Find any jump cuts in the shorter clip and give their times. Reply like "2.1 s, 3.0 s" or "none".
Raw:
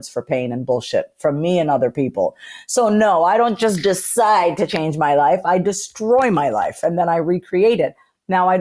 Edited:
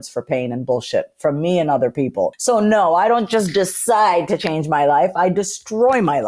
2.4 s